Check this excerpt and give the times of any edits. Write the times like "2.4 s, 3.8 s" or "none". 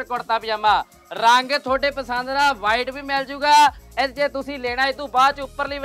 none

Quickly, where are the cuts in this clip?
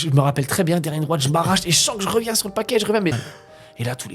3.1 s

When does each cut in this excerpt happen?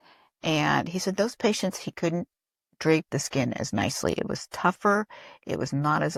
none

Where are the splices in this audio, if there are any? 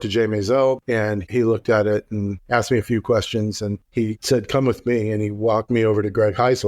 0.8 s, 2.4 s, 3.8 s

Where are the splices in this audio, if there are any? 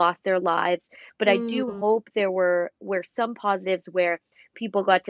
none

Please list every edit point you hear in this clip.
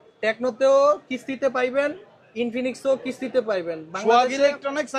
none

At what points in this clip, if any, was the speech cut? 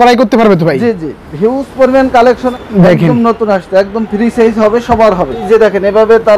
2.4 s, 5.4 s

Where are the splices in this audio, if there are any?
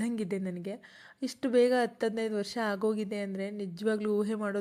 none

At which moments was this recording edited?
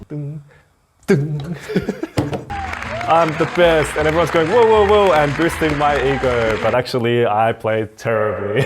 2.4 s

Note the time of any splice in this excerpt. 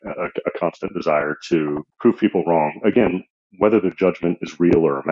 1.9 s

